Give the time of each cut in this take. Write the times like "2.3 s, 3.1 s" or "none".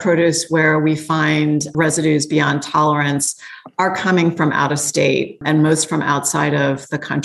1.7 s, 5.4 s